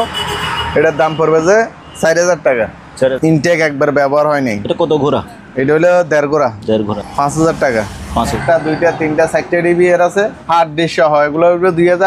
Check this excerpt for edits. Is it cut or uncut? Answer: cut